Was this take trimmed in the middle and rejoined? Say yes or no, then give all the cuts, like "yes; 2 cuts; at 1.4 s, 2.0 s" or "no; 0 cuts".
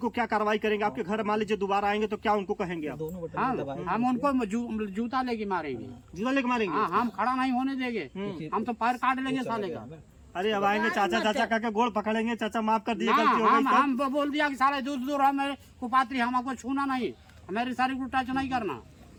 no; 0 cuts